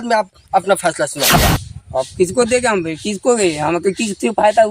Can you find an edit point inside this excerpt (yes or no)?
yes